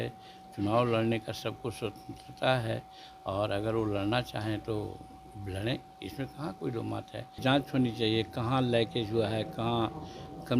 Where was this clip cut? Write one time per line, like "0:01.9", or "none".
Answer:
0:07.4